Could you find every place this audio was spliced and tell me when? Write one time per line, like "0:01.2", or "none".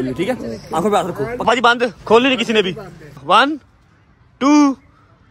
0:01.4
0:03.2